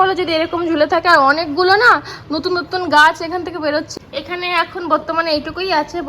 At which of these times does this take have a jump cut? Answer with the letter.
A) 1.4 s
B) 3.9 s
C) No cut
B